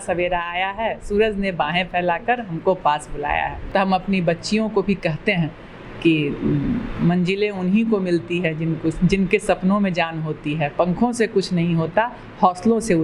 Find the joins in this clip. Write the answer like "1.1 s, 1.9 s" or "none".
3.6 s